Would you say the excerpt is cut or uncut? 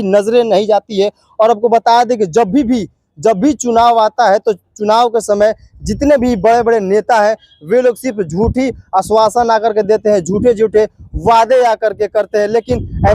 uncut